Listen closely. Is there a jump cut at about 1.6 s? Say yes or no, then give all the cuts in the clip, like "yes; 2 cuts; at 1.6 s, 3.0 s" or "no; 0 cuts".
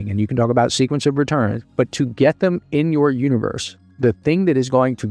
yes; 1 cut; at 1.6 s